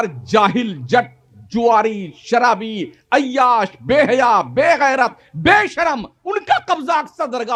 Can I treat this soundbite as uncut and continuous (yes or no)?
yes